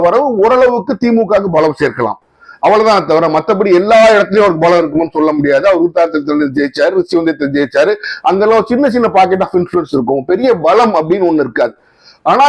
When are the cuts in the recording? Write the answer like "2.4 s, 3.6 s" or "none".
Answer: none